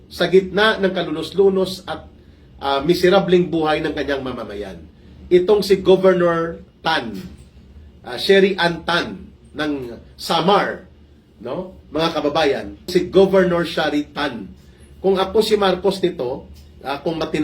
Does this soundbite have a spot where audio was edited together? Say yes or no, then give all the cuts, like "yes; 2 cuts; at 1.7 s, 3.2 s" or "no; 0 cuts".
yes; 1 cut; at 12.9 s